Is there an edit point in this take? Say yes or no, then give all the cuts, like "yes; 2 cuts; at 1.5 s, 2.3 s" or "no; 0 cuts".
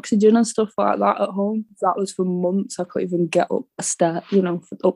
yes; 2 cuts; at 1.7 s, 3.8 s